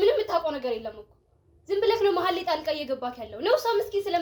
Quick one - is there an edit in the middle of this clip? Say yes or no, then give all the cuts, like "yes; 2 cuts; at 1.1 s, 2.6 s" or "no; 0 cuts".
no; 0 cuts